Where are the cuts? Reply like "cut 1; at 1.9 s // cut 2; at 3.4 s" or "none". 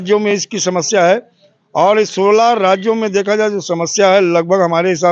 none

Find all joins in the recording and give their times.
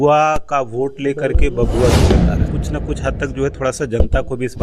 cut 1; at 2.5 s

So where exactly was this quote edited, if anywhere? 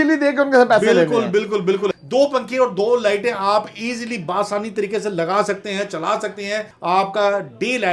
cut 1; at 1.9 s // cut 2; at 6.7 s

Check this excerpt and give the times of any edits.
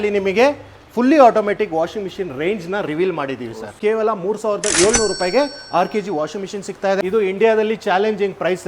cut 1; at 3.7 s // cut 2; at 7.0 s

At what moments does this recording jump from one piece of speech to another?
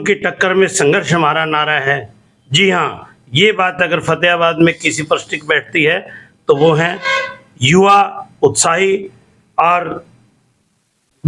none

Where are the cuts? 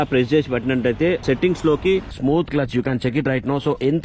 cut 1; at 1.2 s // cut 2; at 2.1 s

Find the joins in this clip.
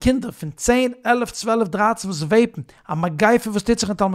none

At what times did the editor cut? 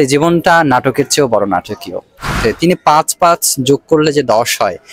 cut 1; at 2.3 s

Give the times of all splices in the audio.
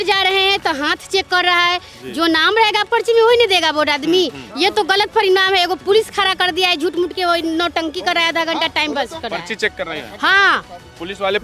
none

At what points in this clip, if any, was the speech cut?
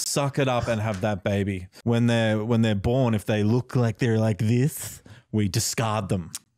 cut 1; at 1.7 s

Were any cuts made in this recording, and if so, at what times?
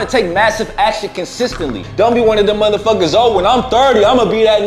cut 1; at 1.8 s

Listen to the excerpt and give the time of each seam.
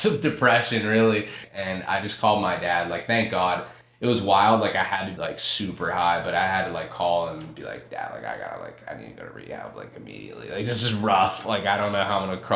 cut 1; at 1.5 s // cut 2; at 5.1 s

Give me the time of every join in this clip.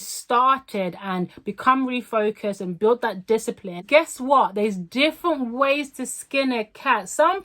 cut 1; at 3.8 s

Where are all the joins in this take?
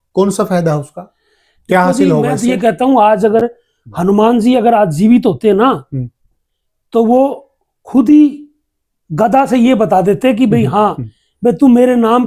none

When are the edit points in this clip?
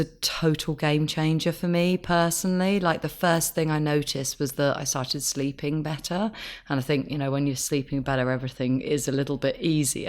none

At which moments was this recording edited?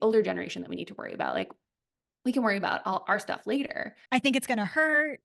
cut 1; at 3.9 s

